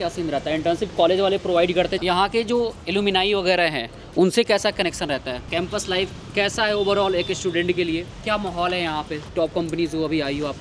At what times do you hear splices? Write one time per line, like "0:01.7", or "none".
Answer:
0:01.9
0:05.5
0:08.1
0:09.3